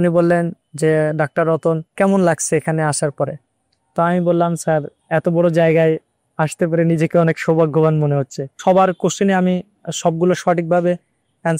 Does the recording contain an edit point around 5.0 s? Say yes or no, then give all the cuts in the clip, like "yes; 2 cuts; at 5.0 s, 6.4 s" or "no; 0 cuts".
yes; 3 cuts; at 1.9 s, 5.0 s, 8.6 s